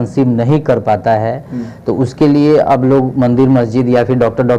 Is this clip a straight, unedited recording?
yes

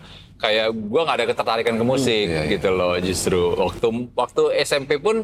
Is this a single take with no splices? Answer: yes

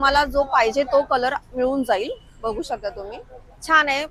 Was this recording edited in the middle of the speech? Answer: no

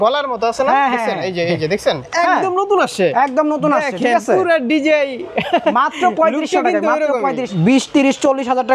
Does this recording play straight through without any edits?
no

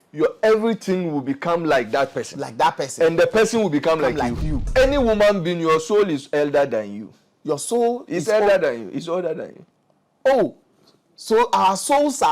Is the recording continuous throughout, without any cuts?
no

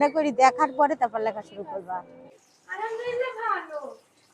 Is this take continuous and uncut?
no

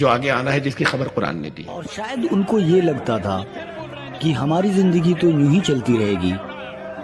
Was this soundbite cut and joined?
yes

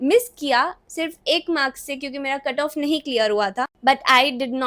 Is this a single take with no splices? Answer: no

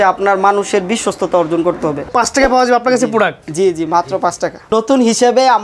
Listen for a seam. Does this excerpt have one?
yes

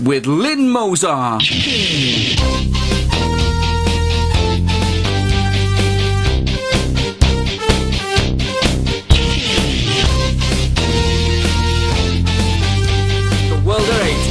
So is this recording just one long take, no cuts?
yes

